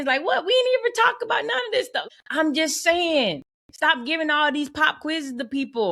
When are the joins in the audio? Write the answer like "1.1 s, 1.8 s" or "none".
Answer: 2.0 s